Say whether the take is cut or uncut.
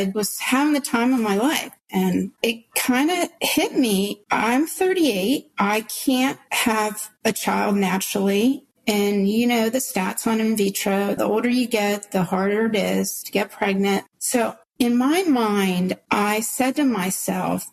cut